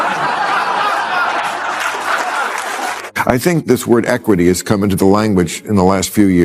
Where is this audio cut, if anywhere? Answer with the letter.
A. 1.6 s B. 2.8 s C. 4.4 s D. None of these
B